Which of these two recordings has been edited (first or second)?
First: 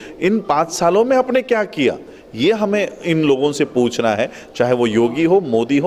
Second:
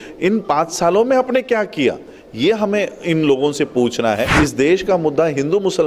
second